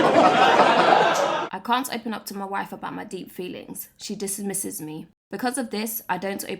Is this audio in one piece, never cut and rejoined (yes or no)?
no